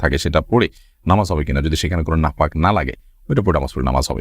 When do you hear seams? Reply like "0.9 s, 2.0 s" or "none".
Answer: none